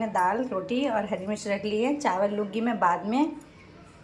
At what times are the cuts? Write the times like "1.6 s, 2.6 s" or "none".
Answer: none